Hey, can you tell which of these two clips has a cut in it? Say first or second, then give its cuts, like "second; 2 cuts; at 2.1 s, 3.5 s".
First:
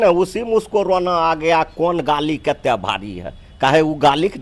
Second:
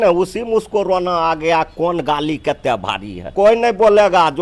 second; 1 cut; at 3.3 s